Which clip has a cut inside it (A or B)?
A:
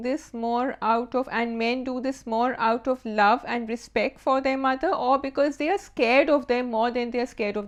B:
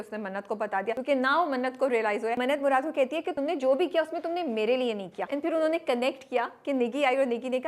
B